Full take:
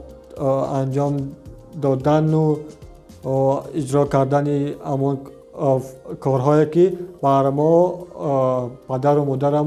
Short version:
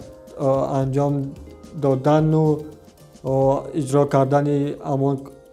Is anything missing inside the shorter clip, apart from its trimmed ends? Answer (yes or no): no